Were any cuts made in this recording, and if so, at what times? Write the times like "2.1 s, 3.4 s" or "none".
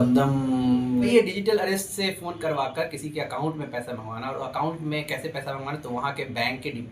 1.1 s